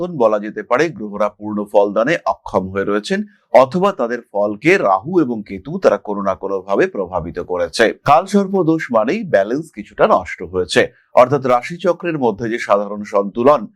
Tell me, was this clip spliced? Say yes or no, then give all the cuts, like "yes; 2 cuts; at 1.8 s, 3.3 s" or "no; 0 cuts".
no; 0 cuts